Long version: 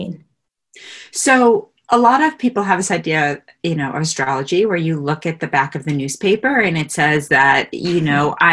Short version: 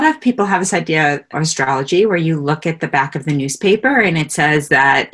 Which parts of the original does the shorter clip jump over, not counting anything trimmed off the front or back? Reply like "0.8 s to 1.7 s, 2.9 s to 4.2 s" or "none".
3.5 s to 3.9 s